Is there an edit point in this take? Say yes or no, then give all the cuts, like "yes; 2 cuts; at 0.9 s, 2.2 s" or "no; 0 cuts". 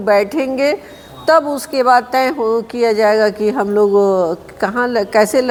no; 0 cuts